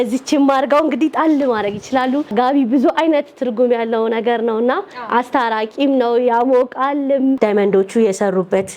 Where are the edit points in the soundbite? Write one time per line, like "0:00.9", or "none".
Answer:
0:02.3
0:07.4

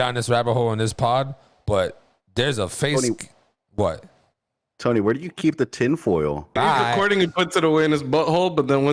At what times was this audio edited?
0:06.6

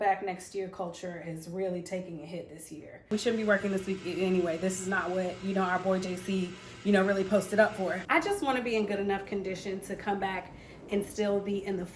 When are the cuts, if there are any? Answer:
0:03.1
0:08.0

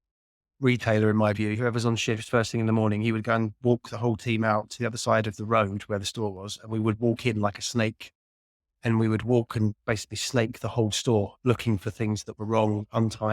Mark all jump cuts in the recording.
0:01.6

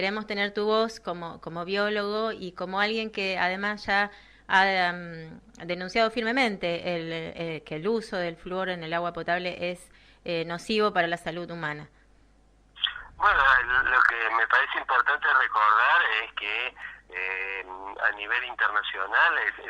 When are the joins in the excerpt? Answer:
0:12.8

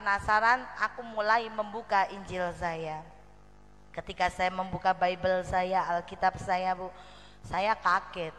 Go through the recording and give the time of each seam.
none

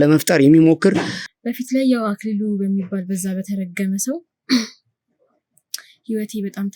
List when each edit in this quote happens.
0:01.2

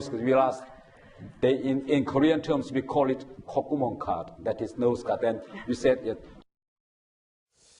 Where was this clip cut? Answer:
0:06.0

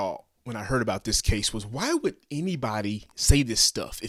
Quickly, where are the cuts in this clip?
none

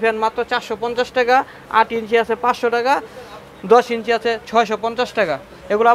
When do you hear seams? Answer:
none

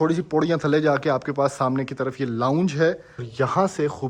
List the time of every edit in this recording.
0:03.2

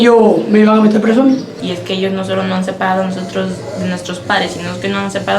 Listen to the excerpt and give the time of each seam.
0:01.5

